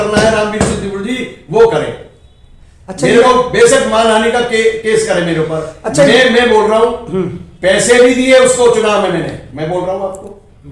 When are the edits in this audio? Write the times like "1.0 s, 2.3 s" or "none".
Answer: none